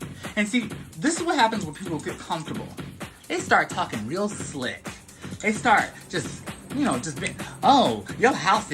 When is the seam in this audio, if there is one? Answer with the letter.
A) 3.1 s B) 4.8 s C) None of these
B